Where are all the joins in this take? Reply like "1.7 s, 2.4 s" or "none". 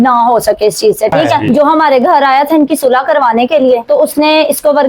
1.4 s

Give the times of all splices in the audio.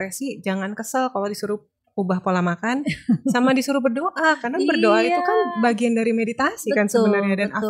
none

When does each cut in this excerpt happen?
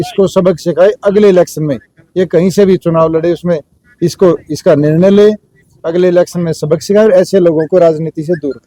none

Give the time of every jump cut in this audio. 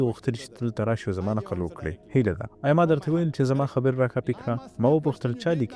none

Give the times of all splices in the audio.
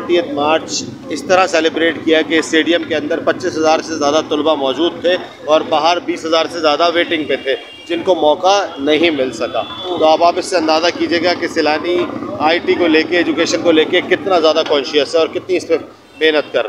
none

